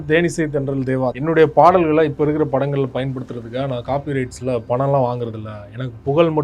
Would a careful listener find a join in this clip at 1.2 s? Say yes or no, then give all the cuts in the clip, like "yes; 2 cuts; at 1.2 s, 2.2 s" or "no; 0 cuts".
yes; 1 cut; at 1.2 s